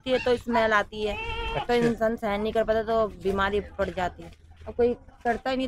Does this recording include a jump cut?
no; 0 cuts

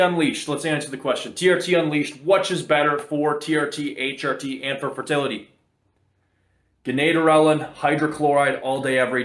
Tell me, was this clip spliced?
no; 0 cuts

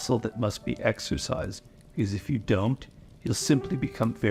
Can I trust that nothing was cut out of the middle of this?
yes; 0 cuts

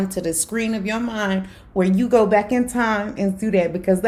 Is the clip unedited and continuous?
yes; 0 cuts

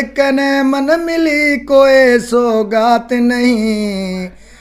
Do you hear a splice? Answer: no; 0 cuts

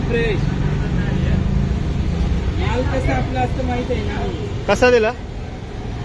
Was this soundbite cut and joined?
no; 0 cuts

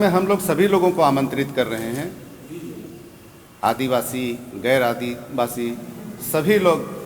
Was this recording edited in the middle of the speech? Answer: no; 0 cuts

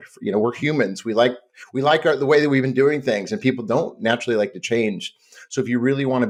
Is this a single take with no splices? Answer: yes; 0 cuts

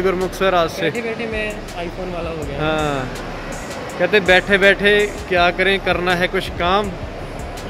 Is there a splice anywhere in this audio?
no; 0 cuts

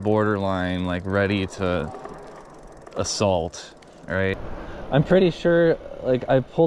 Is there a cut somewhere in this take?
yes; 1 cut; at 4.3 s

